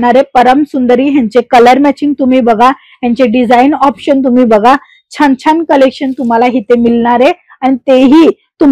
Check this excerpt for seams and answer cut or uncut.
uncut